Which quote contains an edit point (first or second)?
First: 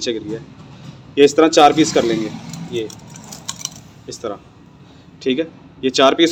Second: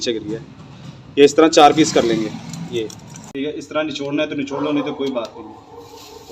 second